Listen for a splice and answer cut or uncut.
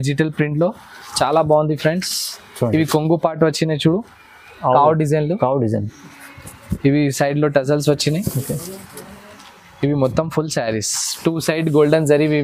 uncut